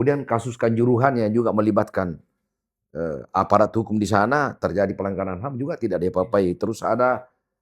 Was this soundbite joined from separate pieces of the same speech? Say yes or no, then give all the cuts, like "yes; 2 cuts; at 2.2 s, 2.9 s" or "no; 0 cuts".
no; 0 cuts